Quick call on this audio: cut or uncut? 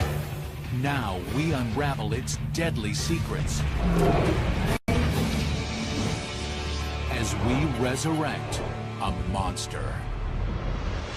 uncut